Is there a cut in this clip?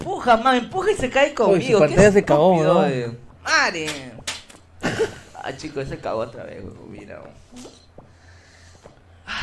yes; 1 cut; at 3.3 s

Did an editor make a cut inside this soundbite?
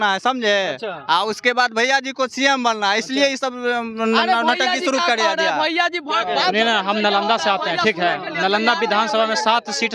no; 0 cuts

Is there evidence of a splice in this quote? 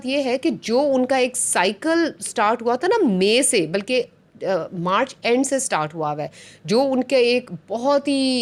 no; 0 cuts

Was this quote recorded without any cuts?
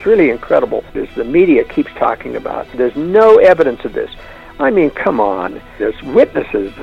no; 3 cuts; at 1.0 s, 2.7 s, 5.8 s

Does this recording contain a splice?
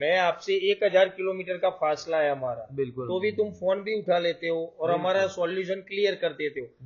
no; 0 cuts

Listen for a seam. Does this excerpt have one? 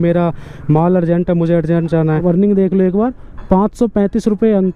yes; 1 cut; at 2.2 s

